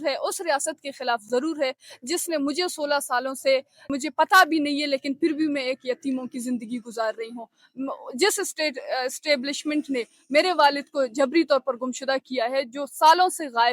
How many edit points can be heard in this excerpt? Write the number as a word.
one